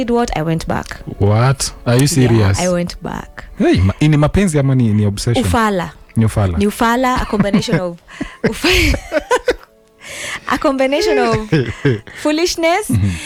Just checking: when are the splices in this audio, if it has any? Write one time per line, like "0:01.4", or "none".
none